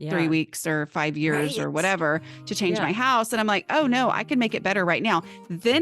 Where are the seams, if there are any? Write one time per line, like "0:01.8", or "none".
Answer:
none